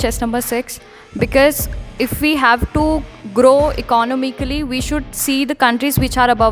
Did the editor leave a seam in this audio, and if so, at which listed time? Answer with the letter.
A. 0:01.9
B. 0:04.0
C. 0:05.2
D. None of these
D